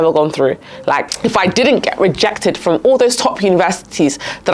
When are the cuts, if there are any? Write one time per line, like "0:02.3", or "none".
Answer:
0:01.1